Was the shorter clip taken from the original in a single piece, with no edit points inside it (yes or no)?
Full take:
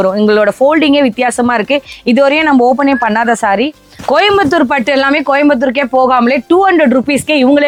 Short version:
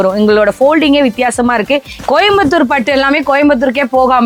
no